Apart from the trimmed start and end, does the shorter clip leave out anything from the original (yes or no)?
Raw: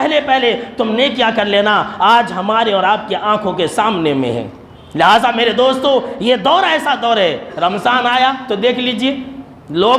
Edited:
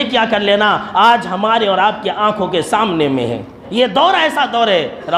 yes